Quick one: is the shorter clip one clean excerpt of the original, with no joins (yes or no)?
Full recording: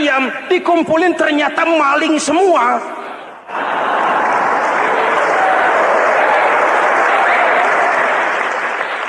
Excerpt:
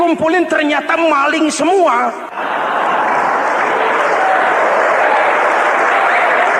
no